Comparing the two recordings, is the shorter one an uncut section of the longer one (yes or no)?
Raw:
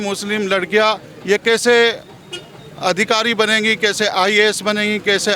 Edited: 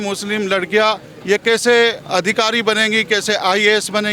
no